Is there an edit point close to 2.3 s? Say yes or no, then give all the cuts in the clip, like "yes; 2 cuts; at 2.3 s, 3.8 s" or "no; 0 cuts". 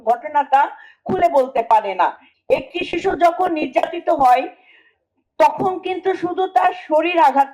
yes; 1 cut; at 2.3 s